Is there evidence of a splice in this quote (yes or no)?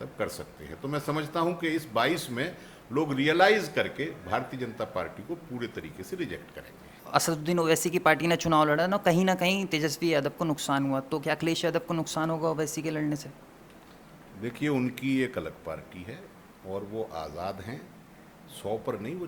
yes